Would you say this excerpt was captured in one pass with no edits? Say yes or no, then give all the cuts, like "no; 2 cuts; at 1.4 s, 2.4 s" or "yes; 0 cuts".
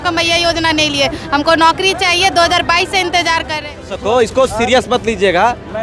no; 1 cut; at 3.9 s